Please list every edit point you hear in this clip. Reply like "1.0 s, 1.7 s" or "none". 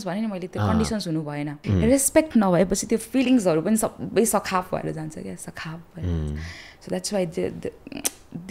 1.6 s